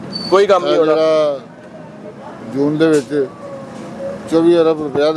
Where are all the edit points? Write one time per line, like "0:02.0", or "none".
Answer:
none

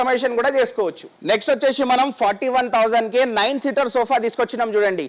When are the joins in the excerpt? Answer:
none

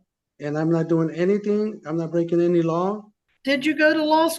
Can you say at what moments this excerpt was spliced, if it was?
0:03.2

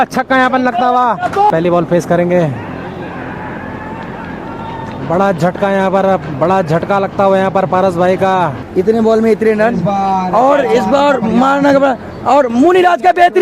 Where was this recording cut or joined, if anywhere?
0:01.5
0:08.6

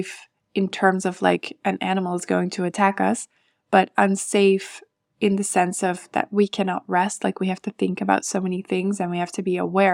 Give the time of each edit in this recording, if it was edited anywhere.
none

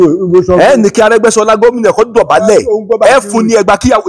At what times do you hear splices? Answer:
0:02.1
0:03.0

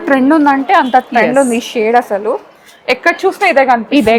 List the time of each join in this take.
none

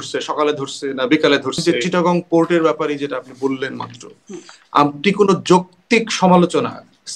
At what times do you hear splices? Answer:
0:01.6

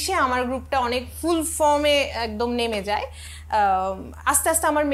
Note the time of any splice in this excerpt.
none

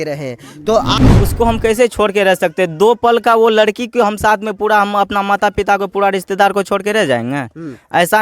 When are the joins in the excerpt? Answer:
0:00.9

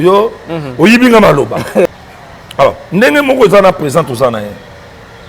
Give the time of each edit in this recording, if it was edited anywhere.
0:01.9

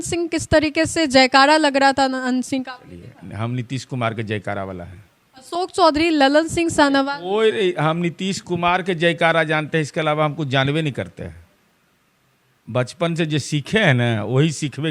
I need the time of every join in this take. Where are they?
none

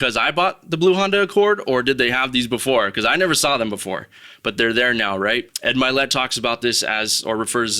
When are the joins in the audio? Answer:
0:05.5

